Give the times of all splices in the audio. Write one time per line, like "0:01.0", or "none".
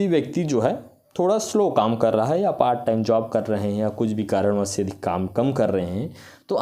none